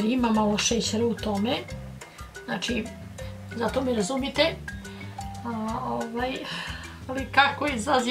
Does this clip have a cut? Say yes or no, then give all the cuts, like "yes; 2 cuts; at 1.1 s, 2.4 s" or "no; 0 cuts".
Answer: no; 0 cuts